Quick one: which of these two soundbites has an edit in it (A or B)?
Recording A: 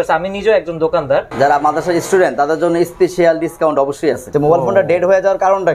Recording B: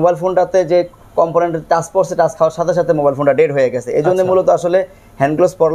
A